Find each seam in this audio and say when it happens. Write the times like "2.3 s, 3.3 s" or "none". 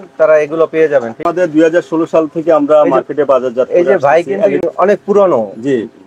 1.2 s, 4.6 s